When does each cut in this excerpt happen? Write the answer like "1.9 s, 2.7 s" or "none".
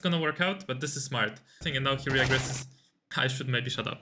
1.6 s, 2.9 s